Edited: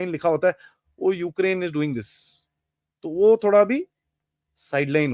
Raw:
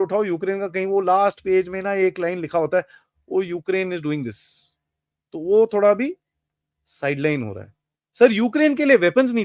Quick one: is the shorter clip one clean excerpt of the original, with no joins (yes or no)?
yes